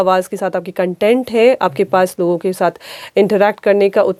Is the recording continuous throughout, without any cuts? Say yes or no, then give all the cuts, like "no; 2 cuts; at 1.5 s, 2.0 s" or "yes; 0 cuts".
yes; 0 cuts